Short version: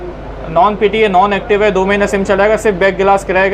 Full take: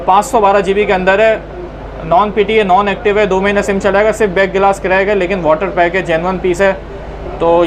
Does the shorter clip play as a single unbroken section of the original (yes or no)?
yes